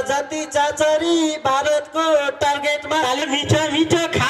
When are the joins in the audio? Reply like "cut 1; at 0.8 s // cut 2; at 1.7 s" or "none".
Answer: cut 1; at 3.2 s